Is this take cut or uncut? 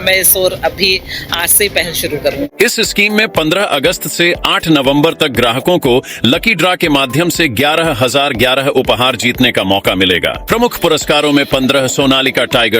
cut